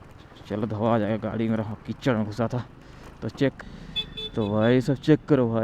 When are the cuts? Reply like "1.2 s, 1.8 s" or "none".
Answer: 3.6 s